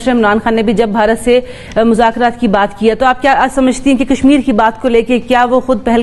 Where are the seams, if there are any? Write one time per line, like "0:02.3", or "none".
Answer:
none